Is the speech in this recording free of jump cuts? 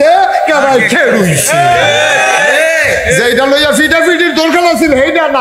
yes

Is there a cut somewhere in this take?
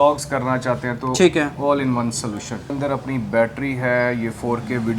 yes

